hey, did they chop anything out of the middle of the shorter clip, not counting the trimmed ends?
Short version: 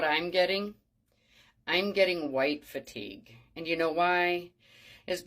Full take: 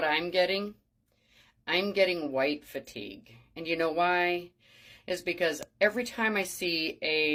no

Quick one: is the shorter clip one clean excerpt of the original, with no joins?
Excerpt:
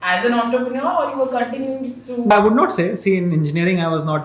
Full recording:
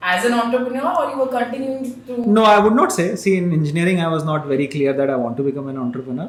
no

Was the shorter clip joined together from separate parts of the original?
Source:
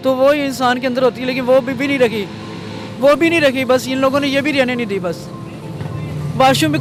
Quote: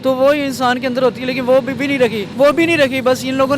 yes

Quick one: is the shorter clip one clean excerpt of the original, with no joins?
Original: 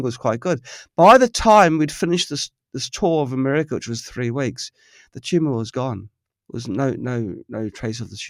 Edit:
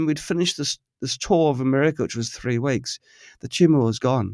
yes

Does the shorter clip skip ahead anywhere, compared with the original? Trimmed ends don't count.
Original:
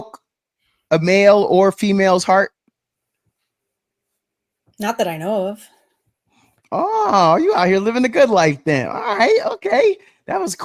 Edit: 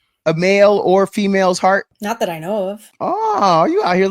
yes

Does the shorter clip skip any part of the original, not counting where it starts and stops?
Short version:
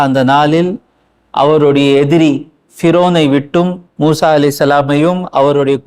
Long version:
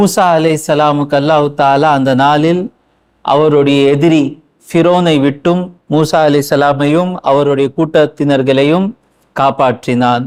no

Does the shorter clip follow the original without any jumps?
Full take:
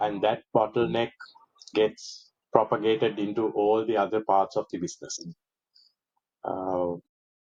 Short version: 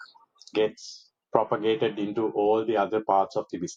yes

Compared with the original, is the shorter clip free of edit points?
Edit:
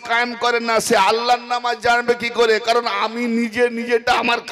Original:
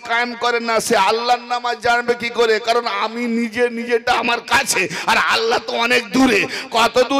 yes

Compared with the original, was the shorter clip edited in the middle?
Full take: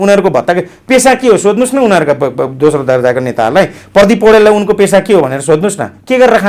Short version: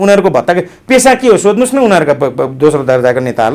no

